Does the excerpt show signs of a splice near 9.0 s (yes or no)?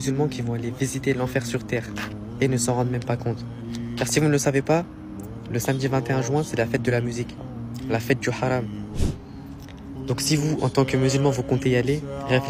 yes